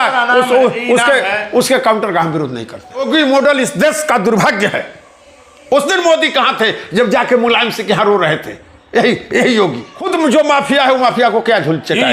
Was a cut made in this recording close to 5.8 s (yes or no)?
no